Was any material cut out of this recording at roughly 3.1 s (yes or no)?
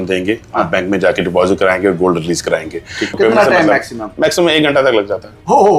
yes